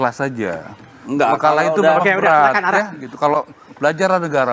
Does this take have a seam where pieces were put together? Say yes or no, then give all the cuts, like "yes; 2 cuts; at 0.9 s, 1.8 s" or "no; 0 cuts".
no; 0 cuts